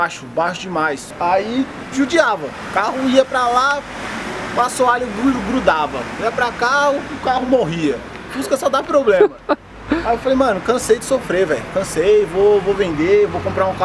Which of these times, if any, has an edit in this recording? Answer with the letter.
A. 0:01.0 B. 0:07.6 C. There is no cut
A